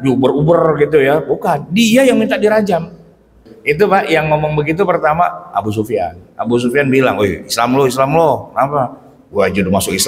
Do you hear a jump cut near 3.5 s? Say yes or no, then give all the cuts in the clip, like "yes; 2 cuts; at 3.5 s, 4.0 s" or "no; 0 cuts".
yes; 1 cut; at 3.5 s